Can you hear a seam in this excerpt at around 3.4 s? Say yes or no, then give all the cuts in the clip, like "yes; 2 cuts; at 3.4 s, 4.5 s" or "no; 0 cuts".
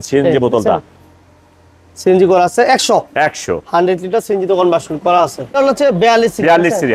no; 1 cut; at 5.6 s